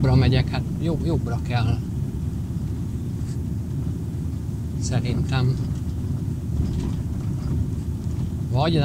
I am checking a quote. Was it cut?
no; 0 cuts

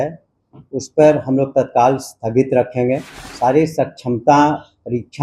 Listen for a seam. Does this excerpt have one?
yes; 1 cut; at 3.2 s

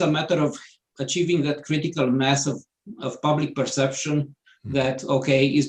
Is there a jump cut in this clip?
no; 0 cuts

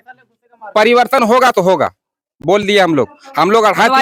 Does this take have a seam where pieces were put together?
no; 0 cuts

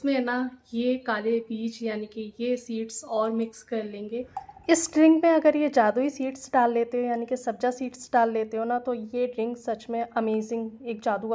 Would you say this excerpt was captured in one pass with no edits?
yes; 0 cuts

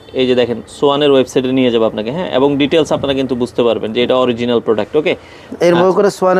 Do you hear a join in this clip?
no; 0 cuts

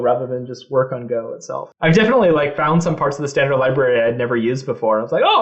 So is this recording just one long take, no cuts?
no; 1 cut; at 1.7 s

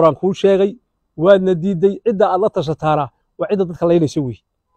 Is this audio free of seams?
yes; 0 cuts

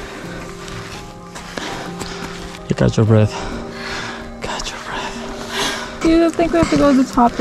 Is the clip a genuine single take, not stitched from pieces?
no; 1 cut; at 2.6 s

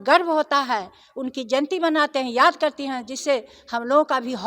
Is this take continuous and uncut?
yes; 0 cuts

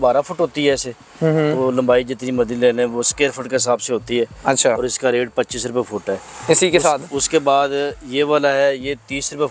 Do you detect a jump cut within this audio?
no; 0 cuts

